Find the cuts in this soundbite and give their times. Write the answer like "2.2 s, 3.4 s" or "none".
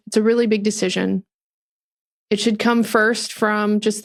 none